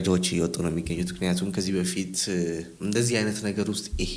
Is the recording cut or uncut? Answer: uncut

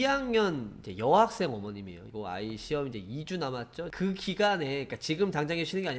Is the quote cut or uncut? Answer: cut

